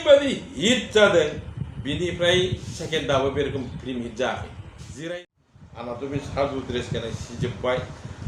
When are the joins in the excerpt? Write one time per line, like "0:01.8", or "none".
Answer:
0:05.2